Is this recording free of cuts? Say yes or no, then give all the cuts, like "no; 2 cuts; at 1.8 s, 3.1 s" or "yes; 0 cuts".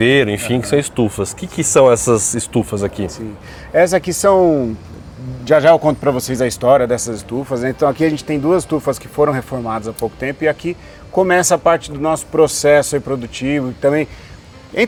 yes; 0 cuts